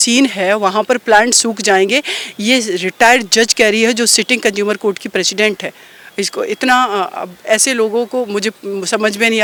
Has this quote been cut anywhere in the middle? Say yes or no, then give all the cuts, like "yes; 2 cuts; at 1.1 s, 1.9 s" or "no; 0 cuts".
no; 0 cuts